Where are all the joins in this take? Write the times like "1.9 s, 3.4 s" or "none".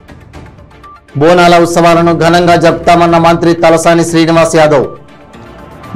1.0 s

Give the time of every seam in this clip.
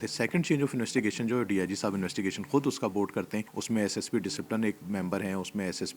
3.5 s

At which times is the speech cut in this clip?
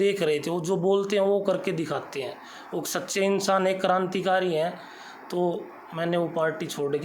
none

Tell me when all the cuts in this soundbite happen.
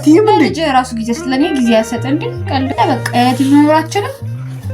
2.7 s

